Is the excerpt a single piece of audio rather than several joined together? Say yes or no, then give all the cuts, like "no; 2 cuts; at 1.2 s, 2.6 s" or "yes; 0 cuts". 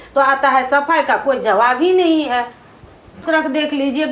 no; 1 cut; at 3.2 s